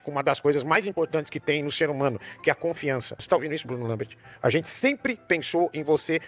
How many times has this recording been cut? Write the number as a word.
one